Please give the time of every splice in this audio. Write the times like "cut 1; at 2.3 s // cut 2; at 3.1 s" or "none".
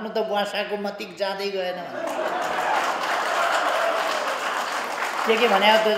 none